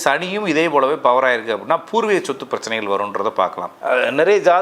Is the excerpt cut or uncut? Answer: cut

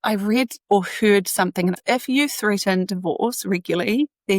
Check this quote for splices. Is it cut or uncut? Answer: cut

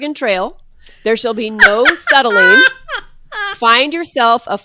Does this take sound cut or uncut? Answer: uncut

